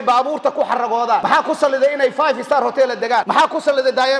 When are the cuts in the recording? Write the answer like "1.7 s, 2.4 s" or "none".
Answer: 1.2 s, 3.3 s